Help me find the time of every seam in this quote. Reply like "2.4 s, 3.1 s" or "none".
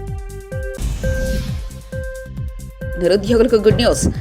2.9 s